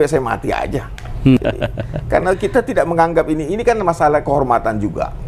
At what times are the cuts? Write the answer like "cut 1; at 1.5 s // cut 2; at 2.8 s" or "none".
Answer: cut 1; at 1.4 s